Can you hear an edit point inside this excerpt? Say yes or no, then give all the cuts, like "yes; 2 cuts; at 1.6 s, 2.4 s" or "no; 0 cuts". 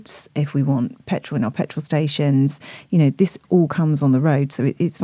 no; 0 cuts